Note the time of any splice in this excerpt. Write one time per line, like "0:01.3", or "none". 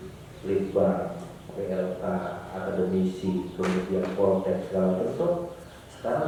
none